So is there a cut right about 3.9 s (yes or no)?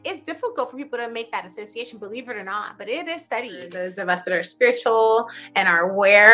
yes